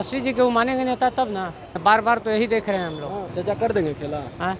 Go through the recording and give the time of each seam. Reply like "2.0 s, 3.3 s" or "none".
1.7 s, 3.3 s